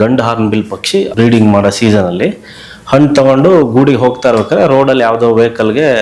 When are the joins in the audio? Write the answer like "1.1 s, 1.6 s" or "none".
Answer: 1.1 s